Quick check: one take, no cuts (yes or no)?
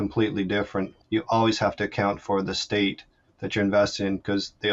no